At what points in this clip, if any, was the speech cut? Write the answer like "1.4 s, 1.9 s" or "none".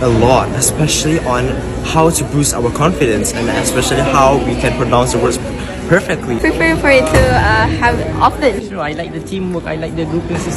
none